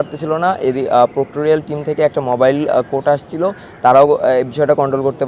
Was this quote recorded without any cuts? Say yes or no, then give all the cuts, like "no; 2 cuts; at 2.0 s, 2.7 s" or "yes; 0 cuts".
yes; 0 cuts